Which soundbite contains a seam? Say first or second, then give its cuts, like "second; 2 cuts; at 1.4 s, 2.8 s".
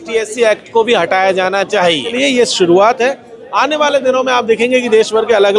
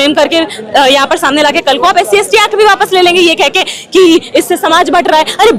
first; 1 cut; at 2.1 s